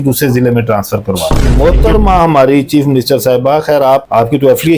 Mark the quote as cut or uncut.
cut